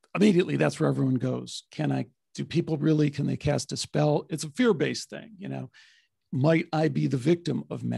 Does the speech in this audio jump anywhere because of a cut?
no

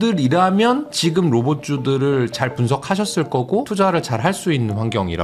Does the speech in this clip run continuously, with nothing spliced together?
no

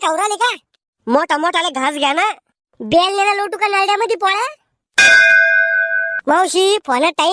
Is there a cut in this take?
no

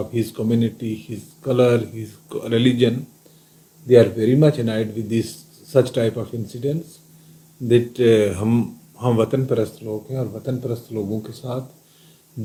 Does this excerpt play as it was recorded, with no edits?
yes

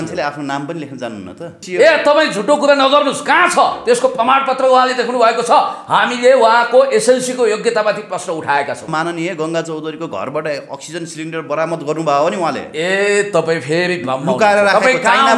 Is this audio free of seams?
no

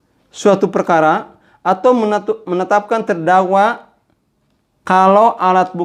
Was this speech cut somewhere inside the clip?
no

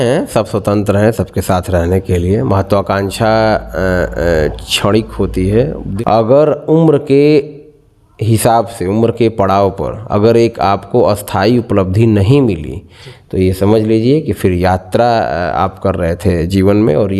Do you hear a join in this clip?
yes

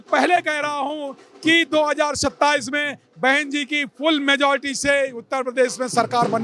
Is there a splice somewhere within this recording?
no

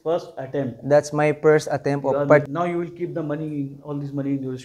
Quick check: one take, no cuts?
no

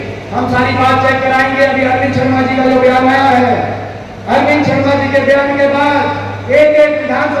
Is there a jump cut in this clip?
no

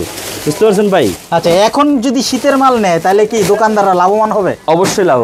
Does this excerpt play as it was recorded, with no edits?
yes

